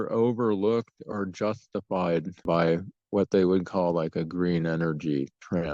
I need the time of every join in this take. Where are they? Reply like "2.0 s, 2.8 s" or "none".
2.4 s